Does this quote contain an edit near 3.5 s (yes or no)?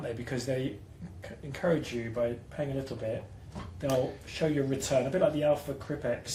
no